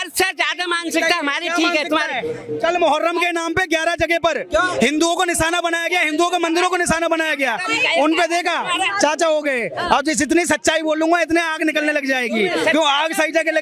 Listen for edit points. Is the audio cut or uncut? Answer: uncut